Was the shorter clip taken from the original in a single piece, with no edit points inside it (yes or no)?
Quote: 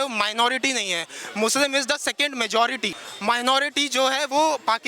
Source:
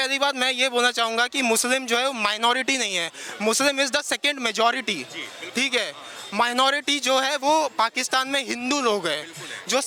no